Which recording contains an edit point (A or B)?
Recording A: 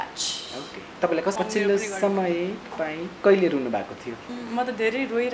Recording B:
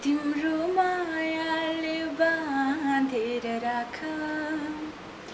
A